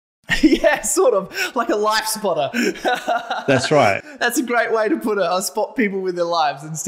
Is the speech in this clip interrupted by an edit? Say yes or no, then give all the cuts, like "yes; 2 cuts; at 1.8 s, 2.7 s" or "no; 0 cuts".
no; 0 cuts